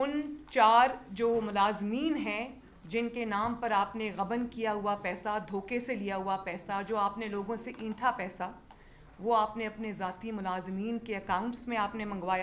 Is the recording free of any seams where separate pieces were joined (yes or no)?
yes